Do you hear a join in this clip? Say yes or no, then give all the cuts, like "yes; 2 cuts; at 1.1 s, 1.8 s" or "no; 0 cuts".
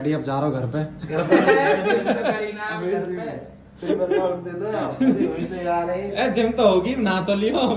no; 0 cuts